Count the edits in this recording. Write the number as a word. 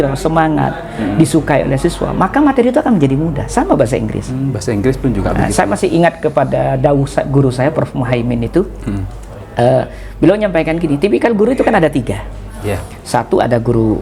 zero